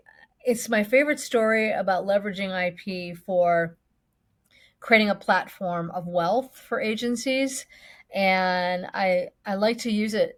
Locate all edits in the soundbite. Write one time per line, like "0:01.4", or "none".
none